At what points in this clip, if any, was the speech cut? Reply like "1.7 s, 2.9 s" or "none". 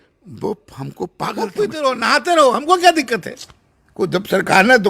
1.4 s